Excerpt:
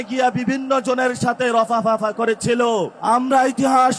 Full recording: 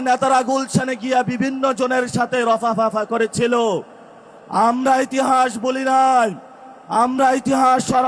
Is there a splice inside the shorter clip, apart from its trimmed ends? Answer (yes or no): yes